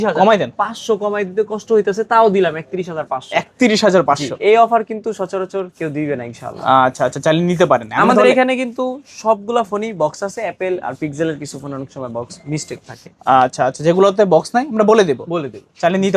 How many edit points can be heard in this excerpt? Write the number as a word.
zero